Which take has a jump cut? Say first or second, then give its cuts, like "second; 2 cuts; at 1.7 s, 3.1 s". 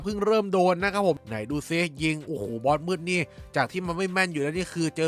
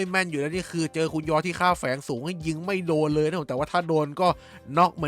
first; 1 cut; at 1.2 s